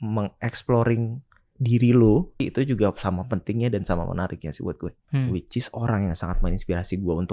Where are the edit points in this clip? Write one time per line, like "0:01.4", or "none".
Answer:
0:02.4
0:05.0